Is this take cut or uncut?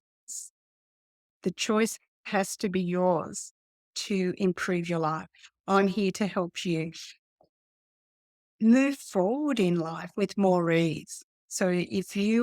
uncut